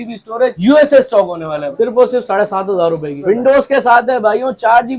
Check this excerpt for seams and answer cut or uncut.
cut